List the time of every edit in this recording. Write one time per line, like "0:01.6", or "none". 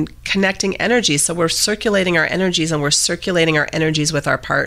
none